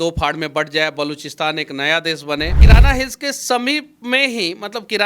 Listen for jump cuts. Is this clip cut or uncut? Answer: cut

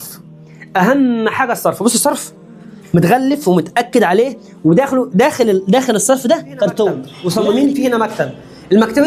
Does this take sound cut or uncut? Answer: cut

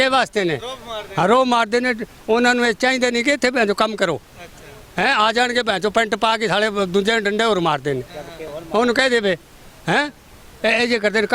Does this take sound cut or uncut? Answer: uncut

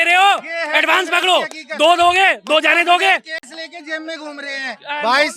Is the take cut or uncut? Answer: uncut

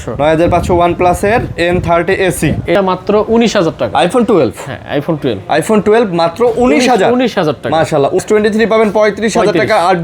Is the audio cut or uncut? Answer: cut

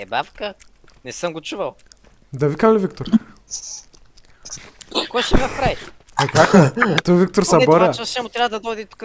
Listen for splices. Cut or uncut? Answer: uncut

